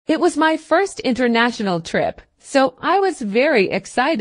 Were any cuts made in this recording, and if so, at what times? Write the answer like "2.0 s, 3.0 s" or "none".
2.3 s